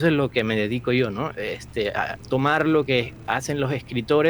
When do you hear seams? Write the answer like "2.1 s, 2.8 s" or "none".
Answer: none